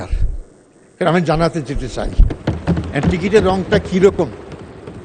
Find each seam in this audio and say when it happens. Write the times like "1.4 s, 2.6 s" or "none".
none